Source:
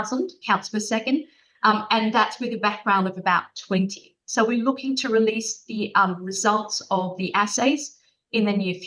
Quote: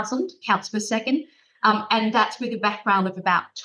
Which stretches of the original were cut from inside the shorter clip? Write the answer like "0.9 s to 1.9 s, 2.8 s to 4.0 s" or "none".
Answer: none